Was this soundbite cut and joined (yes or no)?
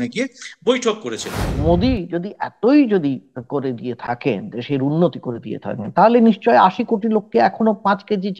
yes